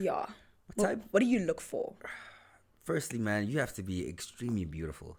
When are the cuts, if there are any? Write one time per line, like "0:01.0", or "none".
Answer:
none